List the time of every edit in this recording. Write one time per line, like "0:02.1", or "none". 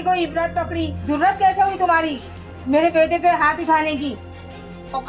0:00.9

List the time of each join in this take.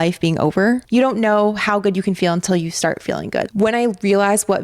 0:00.8
0:03.5

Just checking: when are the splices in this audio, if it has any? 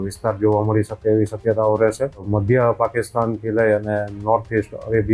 0:02.3

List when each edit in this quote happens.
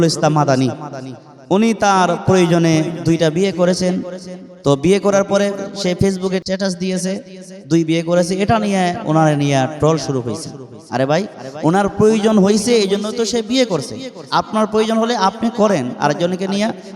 0:06.4

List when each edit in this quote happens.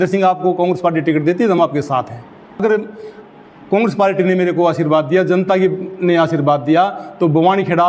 0:02.6

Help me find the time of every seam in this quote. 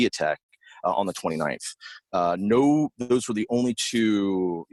none

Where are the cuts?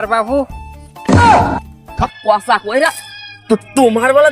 0:02.1

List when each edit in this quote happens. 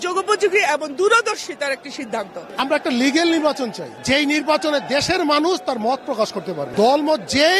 0:02.5
0:03.9
0:06.6

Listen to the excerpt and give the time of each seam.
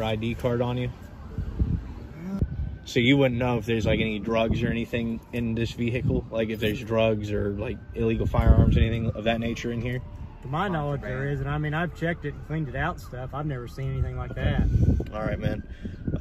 0:02.4

